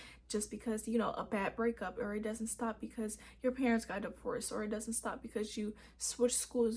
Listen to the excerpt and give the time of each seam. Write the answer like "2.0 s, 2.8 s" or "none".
none